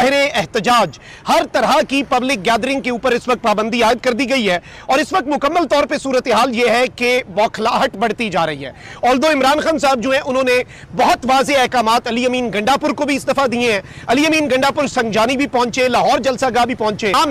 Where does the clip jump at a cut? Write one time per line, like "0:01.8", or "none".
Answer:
none